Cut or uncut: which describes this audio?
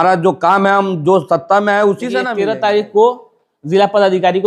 cut